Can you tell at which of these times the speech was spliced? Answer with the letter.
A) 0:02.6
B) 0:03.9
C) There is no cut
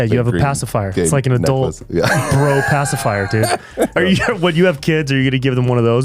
B